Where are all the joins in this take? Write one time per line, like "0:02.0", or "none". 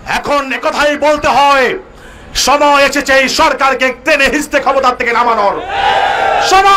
none